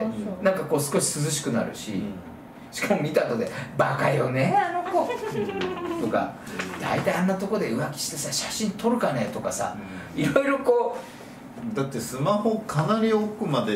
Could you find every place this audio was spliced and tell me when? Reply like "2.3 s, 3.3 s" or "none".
none